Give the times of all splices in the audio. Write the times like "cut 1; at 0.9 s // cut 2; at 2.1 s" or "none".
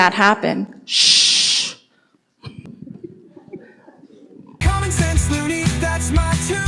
cut 1; at 4.6 s